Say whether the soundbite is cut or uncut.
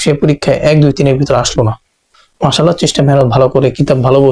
cut